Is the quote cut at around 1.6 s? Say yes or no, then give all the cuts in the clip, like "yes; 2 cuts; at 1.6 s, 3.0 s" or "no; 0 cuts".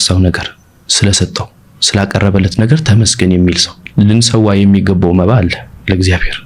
no; 1 cut; at 3.7 s